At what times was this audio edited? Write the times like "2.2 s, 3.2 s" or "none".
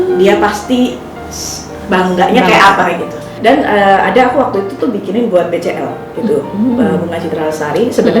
3.3 s